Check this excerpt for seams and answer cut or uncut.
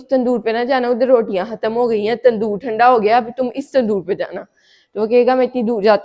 uncut